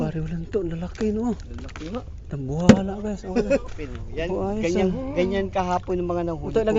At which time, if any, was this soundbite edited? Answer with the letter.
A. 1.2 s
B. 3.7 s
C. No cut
B